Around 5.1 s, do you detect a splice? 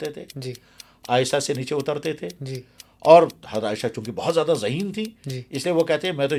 no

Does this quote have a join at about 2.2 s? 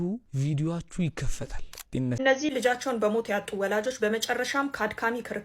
yes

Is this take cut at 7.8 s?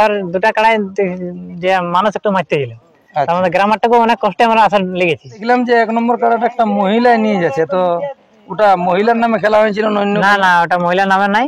no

